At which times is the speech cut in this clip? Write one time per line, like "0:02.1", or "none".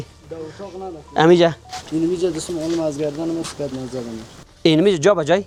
none